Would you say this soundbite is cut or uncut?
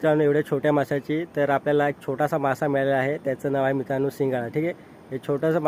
uncut